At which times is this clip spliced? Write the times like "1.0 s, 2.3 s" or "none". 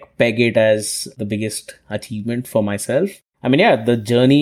1.1 s, 3.1 s